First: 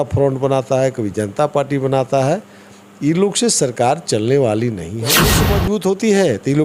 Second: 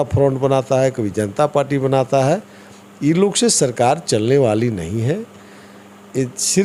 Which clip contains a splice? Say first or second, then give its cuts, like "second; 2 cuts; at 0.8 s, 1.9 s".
first; 1 cut; at 5.4 s